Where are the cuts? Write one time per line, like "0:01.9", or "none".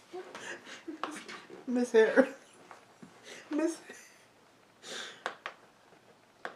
none